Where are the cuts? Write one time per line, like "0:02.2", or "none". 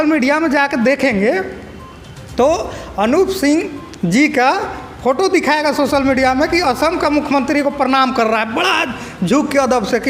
none